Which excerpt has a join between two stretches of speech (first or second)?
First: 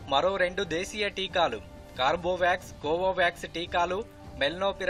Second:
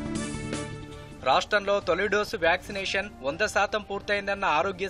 second